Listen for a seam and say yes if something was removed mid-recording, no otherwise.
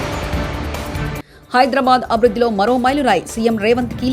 yes